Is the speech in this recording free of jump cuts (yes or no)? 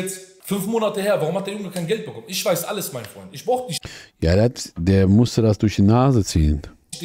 yes